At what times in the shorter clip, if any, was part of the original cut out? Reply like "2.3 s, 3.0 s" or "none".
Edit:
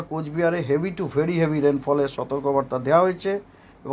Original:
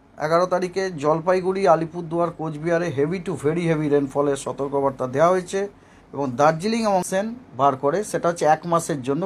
none